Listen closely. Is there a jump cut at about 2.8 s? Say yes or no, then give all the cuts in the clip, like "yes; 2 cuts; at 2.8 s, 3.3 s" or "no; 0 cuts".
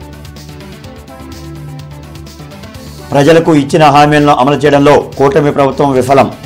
no; 0 cuts